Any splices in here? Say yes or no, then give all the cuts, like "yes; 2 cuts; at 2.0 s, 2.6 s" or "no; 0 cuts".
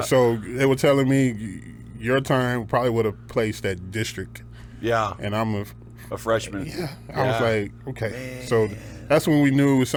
no; 0 cuts